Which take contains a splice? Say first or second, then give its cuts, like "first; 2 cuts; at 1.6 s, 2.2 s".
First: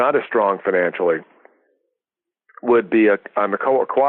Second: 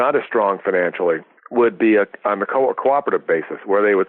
second; 1 cut; at 1.4 s